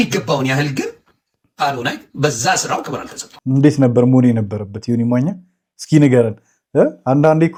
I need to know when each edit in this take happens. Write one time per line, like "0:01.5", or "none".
none